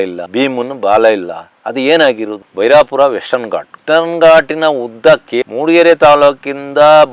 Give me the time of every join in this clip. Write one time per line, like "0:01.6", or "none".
0:02.4
0:05.3